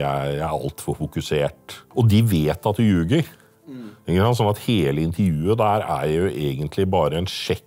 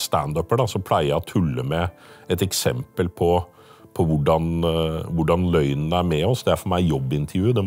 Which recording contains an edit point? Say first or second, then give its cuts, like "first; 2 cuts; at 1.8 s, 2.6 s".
first; 1 cut; at 1.8 s